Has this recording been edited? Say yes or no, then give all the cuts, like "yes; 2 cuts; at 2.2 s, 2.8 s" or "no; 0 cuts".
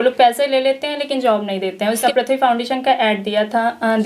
yes; 1 cut; at 2.0 s